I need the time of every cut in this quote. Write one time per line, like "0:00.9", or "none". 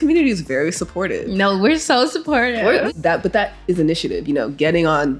0:02.9